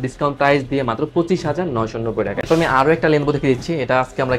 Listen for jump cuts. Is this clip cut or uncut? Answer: uncut